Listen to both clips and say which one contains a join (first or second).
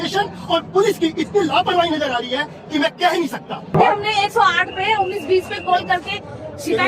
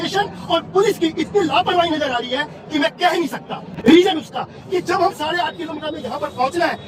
first